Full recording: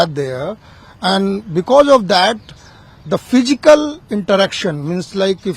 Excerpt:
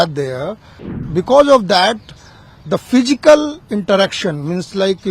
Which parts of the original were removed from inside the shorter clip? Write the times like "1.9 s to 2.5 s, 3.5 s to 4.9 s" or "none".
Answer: 1.0 s to 1.4 s